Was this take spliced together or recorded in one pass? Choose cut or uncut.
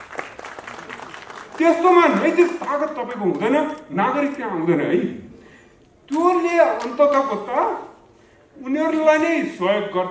uncut